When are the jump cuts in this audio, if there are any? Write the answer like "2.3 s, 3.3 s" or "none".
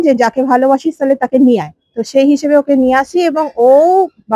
none